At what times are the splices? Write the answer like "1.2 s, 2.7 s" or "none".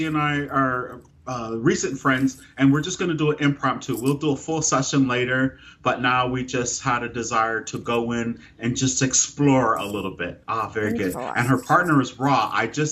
none